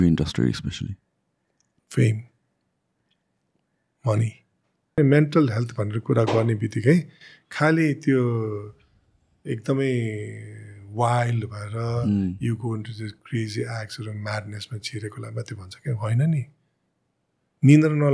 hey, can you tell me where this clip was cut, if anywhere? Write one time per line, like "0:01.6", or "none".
0:05.0